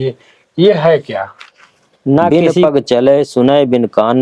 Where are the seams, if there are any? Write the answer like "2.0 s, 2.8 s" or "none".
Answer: 2.3 s